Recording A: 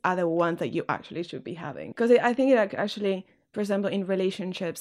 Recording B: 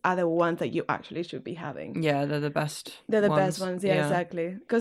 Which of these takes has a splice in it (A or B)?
A